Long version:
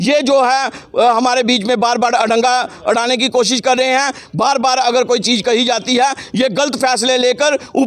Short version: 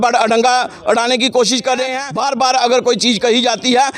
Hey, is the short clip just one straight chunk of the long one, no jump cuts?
no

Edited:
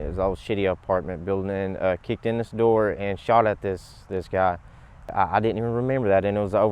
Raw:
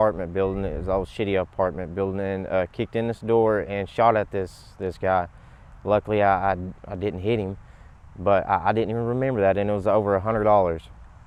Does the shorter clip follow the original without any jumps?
no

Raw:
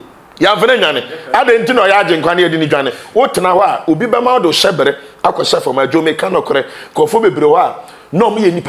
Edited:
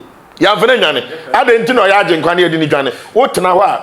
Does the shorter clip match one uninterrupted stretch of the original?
yes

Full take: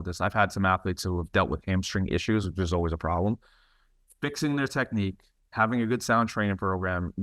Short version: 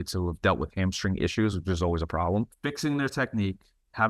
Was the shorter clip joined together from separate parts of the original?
yes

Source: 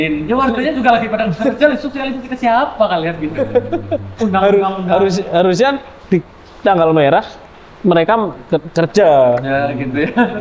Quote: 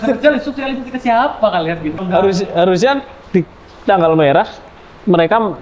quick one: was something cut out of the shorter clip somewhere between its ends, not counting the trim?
yes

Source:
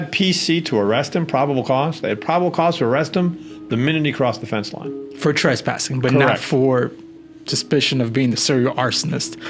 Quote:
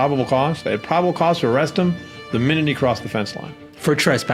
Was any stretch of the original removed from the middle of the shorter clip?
no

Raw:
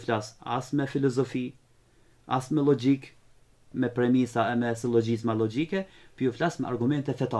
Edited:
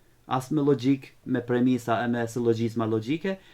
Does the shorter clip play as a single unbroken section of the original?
no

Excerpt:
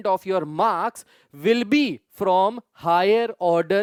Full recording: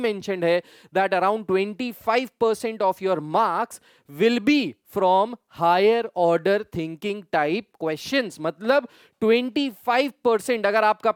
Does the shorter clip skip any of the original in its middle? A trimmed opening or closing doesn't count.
no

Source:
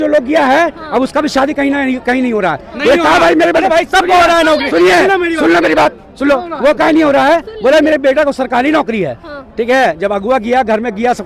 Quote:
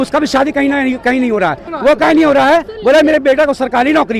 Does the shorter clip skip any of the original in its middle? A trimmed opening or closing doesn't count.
yes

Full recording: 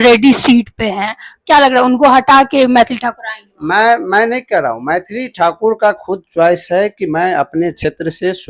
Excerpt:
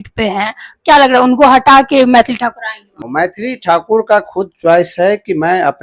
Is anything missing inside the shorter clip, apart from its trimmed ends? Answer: yes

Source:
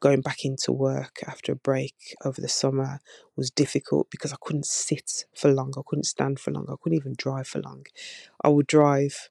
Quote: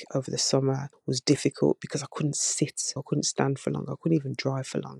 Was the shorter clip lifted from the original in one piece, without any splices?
no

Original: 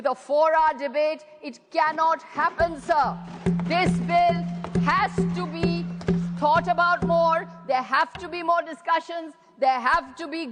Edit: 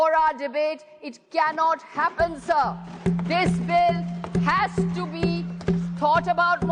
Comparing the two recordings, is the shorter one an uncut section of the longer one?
yes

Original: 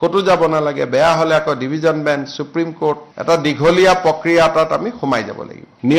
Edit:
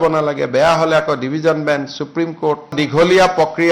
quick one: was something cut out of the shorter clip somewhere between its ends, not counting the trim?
yes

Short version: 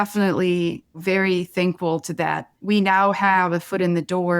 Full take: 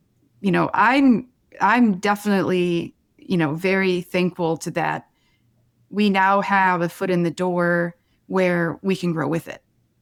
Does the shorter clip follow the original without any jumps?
no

